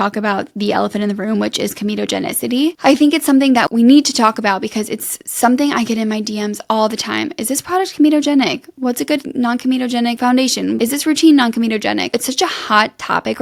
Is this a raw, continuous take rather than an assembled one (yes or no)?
yes